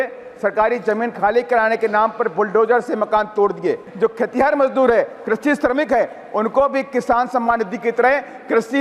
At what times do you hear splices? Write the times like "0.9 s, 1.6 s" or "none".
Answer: 3.9 s

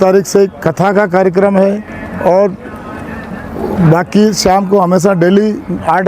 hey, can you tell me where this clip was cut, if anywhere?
none

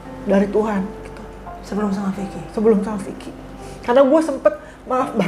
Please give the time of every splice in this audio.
none

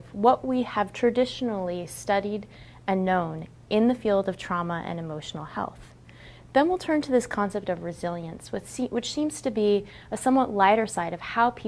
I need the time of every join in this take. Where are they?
4.5 s

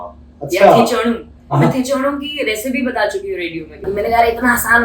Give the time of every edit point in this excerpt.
3.8 s

